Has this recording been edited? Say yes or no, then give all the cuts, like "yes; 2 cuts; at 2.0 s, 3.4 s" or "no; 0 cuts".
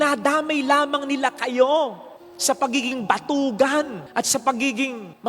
no; 0 cuts